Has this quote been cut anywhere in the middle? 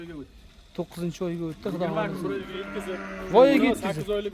yes; 1 cut; at 2.7 s

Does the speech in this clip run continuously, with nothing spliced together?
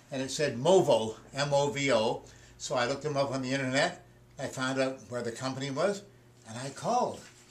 yes; 0 cuts

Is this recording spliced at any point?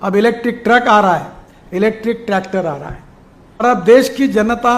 yes; 1 cut; at 3.6 s

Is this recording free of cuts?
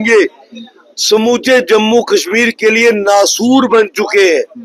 yes; 0 cuts

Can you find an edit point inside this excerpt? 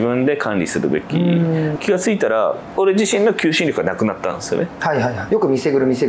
yes; 3 cuts; at 1.8 s, 2.7 s, 5.2 s

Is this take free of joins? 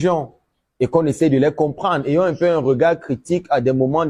yes; 0 cuts

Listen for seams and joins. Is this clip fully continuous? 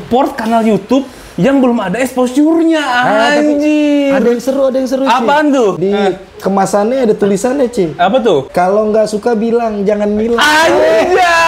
no; 2 cuts; at 5.8 s, 8.5 s

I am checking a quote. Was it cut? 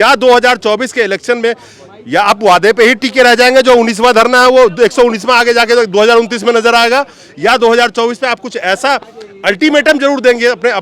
no; 0 cuts

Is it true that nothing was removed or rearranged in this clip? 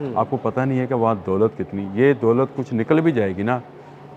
yes; 0 cuts

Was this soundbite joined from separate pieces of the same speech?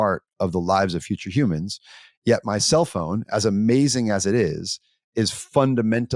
no; 0 cuts

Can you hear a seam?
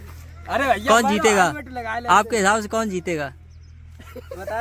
no; 0 cuts

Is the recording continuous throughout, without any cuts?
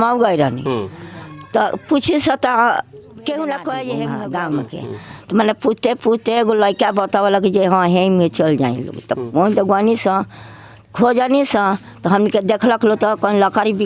no; 1 cut; at 4.0 s

